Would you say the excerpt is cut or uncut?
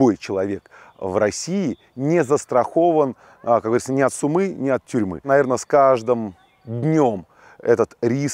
uncut